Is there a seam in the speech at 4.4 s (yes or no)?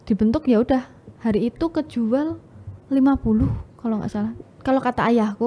yes